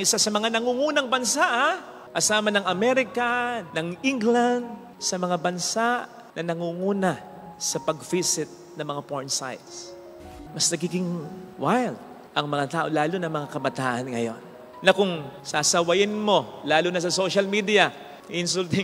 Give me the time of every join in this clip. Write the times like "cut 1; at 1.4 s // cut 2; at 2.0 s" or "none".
cut 1; at 10.2 s